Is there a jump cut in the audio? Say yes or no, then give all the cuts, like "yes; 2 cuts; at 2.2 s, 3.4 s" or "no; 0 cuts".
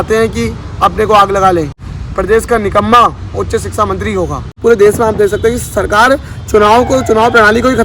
yes; 2 cuts; at 1.8 s, 4.6 s